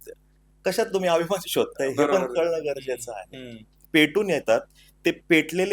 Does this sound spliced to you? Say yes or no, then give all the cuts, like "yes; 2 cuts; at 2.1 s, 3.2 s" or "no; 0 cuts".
yes; 1 cut; at 3.8 s